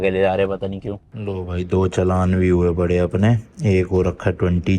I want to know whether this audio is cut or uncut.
cut